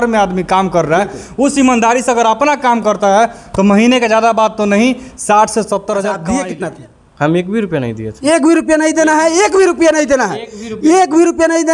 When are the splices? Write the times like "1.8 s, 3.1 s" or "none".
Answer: 6.2 s